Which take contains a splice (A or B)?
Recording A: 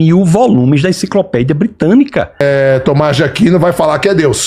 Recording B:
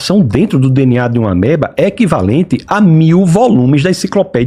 A